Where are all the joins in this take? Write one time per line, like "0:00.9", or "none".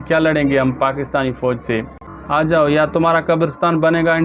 0:02.1